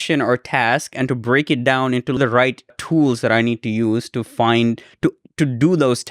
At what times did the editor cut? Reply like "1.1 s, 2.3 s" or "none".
2.2 s